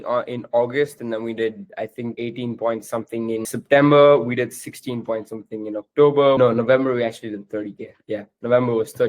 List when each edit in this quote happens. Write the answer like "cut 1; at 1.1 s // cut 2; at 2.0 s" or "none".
cut 1; at 2.2 s // cut 2; at 3.5 s // cut 3; at 6.4 s